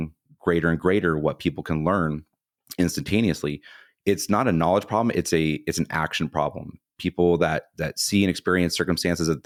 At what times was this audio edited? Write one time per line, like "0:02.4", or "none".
none